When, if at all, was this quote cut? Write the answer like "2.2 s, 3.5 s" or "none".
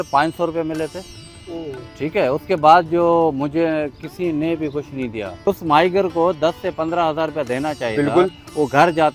5.5 s